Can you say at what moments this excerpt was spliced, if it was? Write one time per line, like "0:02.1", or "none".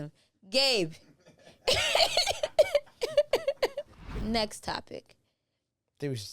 0:04.0